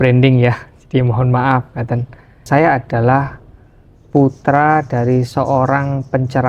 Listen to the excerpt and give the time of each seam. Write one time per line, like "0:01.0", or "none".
0:02.4